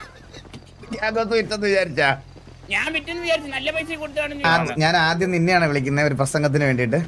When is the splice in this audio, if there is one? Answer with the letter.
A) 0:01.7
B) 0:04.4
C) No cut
B